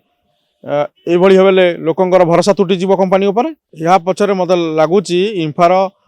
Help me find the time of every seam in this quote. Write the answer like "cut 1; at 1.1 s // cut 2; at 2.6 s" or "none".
cut 1; at 3.7 s